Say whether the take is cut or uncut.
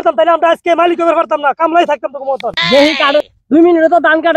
cut